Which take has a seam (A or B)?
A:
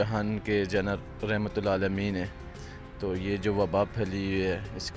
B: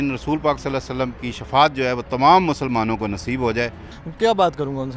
B